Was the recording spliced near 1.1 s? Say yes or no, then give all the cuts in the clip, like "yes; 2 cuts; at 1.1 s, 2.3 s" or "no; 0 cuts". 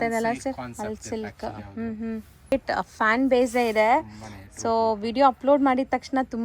no; 1 cut; at 2.5 s